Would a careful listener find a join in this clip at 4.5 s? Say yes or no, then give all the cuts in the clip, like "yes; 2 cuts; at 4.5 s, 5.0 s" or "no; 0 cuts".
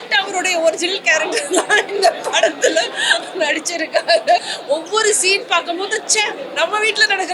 yes; 1 cut; at 4.5 s